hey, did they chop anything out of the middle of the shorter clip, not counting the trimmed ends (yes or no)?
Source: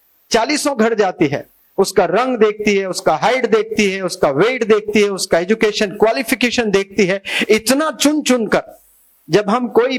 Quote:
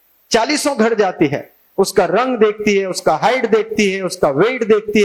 no